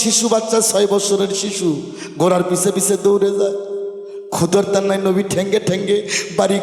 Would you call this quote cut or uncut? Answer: uncut